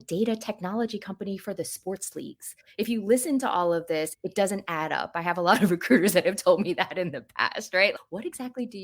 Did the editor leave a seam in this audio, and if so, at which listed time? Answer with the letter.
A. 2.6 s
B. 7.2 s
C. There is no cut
C